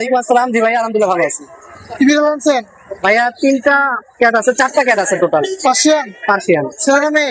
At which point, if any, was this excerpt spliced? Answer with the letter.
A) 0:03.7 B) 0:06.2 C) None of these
C